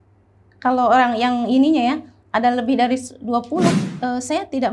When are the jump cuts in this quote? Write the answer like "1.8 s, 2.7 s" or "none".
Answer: 3.8 s